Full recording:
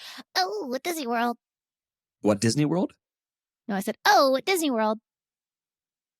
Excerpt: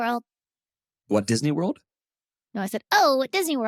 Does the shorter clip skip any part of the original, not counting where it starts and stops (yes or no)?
no